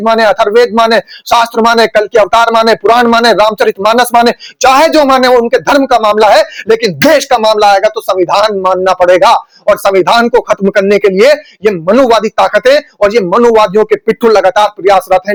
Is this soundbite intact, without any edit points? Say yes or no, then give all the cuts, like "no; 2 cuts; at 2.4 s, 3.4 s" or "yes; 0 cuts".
yes; 0 cuts